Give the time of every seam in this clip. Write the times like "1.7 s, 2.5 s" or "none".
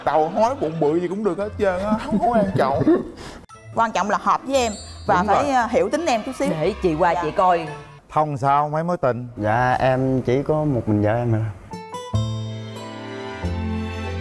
8.0 s